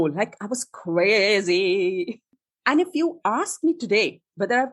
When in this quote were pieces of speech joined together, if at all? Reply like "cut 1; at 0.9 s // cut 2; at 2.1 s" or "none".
cut 1; at 2.2 s